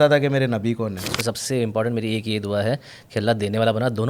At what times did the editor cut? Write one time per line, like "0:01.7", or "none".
0:01.1